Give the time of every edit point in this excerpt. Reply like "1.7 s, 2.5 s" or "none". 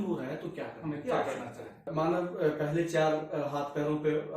1.9 s